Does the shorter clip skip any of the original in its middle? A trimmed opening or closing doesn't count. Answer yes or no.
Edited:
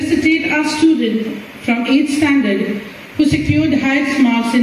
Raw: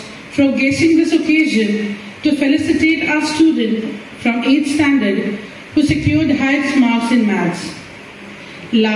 no